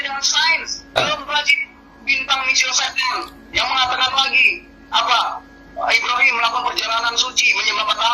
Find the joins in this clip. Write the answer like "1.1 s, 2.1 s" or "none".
1.0 s